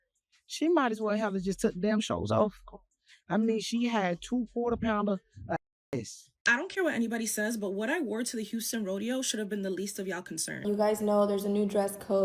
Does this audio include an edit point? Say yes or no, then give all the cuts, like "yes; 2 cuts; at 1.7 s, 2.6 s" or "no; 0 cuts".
yes; 2 cuts; at 6.4 s, 10.6 s